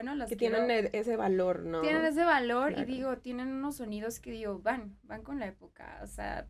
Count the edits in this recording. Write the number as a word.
zero